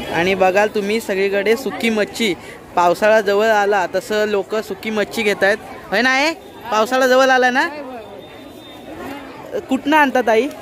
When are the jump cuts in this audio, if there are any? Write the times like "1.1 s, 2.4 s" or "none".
9.0 s